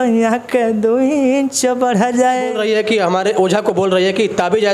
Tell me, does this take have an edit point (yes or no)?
yes